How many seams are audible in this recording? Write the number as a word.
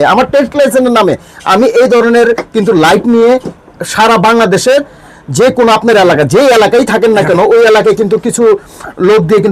zero